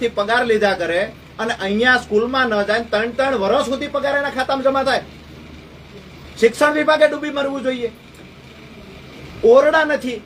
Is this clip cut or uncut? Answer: uncut